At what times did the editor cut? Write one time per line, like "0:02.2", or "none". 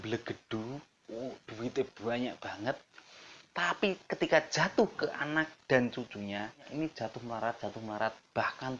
0:06.7